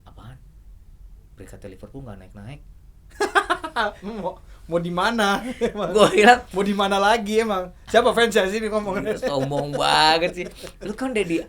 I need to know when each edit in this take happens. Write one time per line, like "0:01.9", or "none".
none